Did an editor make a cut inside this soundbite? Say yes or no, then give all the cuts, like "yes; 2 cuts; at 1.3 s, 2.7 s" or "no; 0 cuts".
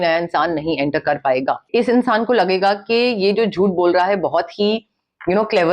yes; 1 cut; at 1.6 s